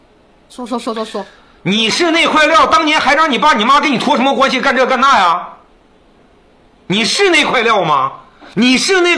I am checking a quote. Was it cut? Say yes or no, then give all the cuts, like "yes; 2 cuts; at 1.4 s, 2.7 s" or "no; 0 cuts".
no; 0 cuts